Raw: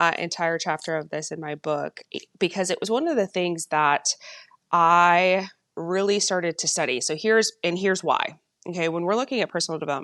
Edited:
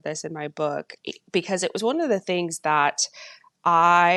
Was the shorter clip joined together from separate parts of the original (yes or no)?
no